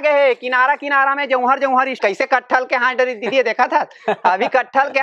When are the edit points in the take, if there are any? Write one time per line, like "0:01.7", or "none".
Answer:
0:02.0